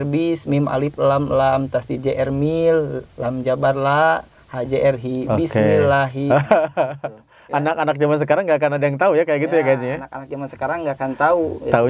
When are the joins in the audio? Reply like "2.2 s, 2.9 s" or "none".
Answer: none